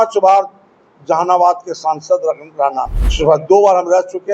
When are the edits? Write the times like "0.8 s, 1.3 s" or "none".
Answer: 3.0 s